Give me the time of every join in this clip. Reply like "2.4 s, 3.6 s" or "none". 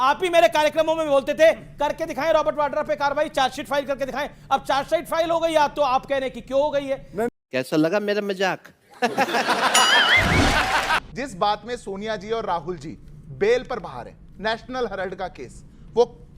11.0 s